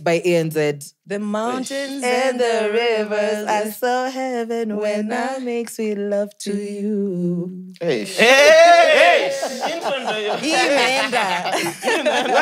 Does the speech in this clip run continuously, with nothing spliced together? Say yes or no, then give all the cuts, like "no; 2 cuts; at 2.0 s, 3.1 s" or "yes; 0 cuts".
yes; 0 cuts